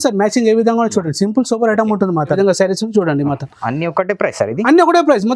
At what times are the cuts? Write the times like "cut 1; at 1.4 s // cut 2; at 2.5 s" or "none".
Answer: cut 1; at 2.4 s